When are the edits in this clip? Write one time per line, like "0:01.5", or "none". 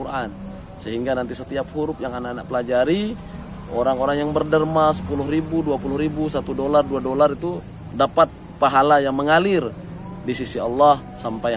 none